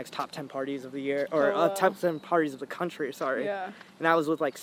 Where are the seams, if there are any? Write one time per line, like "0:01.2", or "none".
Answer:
none